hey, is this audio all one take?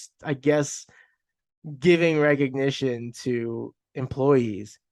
yes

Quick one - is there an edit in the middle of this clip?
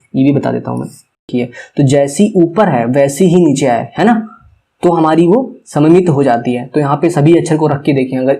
yes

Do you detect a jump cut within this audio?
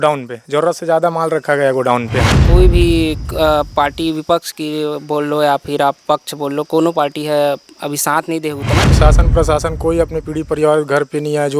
yes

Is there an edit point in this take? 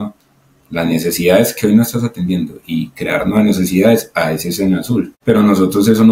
yes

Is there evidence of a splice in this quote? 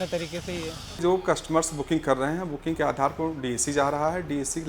yes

